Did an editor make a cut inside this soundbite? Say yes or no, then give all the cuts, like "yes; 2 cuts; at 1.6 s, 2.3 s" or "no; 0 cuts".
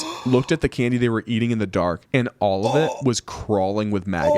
yes; 1 cut; at 2.0 s